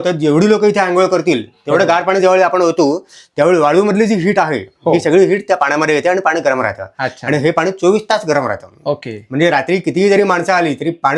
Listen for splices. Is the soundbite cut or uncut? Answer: uncut